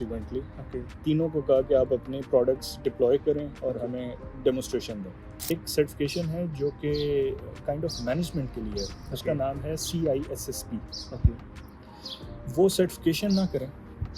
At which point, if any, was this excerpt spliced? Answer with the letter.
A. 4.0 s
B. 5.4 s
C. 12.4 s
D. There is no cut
B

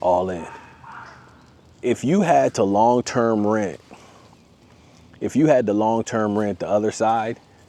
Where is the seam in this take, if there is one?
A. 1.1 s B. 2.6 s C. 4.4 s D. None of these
D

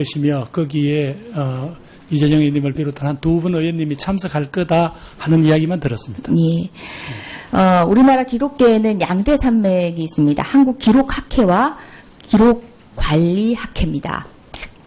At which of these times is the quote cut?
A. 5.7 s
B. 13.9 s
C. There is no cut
A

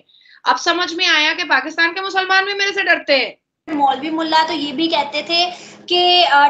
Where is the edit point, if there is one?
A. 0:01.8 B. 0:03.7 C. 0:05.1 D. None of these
B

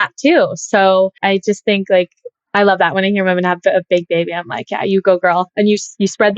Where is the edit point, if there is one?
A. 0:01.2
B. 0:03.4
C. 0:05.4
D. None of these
D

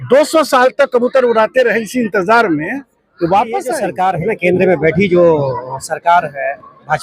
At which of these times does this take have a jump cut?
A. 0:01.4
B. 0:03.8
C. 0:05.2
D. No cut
B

